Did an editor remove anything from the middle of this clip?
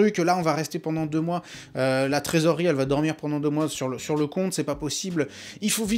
no; 0 cuts

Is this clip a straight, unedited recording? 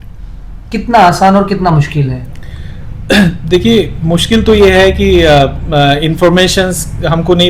yes; 0 cuts

